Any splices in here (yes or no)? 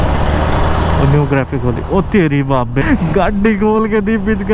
no